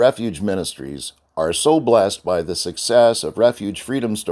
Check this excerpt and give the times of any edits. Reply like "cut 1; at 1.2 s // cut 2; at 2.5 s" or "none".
none